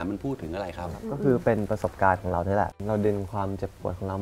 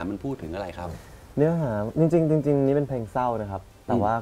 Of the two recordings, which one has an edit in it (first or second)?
first